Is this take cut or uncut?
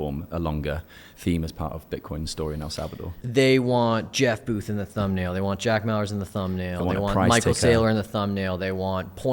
cut